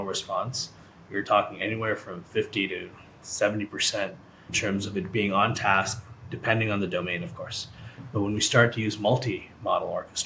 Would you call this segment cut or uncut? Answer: cut